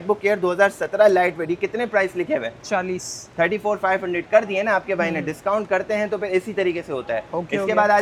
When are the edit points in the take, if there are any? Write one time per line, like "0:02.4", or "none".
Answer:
none